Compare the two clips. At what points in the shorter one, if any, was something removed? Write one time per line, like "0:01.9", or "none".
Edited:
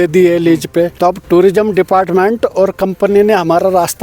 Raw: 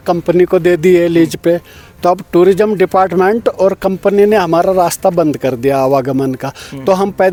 0:00.9